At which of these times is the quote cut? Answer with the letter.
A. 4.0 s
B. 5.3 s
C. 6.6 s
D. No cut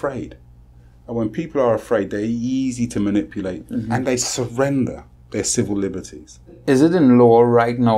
C